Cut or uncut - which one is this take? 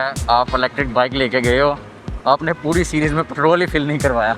uncut